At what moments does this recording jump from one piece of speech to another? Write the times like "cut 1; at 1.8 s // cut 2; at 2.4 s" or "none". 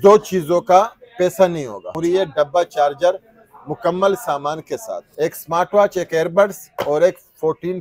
cut 1; at 1.9 s // cut 2; at 5.0 s